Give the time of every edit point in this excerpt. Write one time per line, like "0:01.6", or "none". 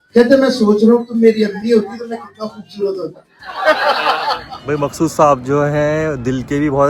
0:04.5

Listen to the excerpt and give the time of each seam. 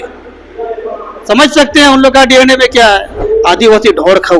0:03.1

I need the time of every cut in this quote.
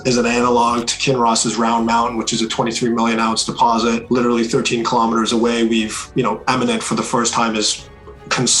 0:04.0

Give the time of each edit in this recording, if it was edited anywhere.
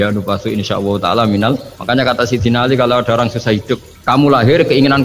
0:01.7
0:03.9

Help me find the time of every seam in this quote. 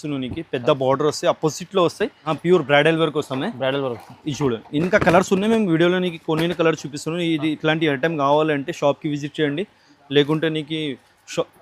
0:02.3

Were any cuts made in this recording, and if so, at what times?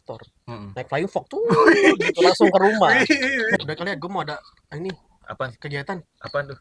0:03.6

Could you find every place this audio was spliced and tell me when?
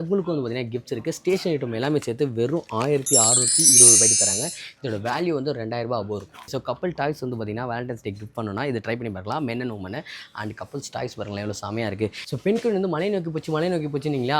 0:12.2

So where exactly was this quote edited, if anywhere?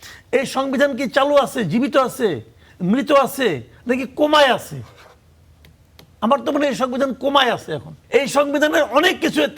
0:07.9

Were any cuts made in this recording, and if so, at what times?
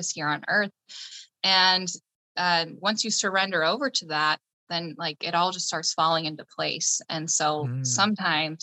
0:01.2

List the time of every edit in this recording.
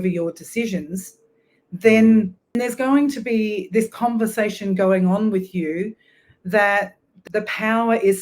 0:02.5
0:07.2

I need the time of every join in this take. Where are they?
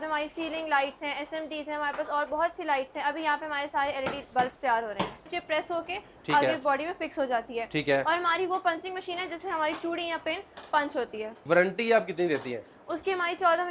0:05.2
0:11.3

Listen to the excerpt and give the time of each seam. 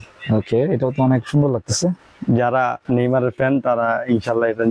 none

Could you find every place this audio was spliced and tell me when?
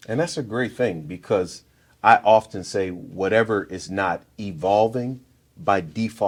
none

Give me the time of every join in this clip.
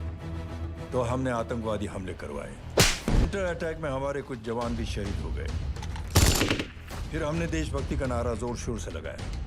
0:03.2

